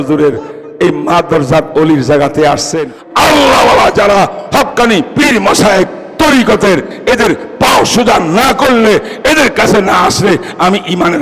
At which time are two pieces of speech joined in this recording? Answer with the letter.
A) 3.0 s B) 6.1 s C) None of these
A